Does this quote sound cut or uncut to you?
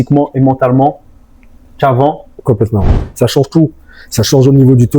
cut